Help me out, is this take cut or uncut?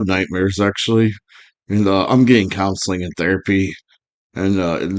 uncut